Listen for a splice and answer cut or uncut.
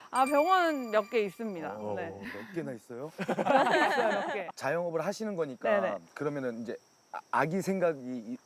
cut